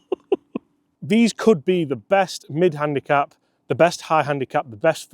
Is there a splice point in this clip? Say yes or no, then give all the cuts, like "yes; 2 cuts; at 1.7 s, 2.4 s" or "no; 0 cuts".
yes; 1 cut; at 0.9 s